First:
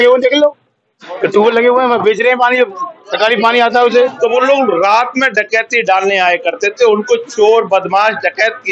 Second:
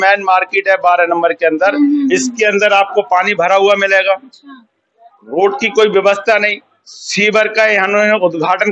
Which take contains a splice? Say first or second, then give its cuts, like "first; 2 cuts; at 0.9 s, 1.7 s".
first; 1 cut; at 4.1 s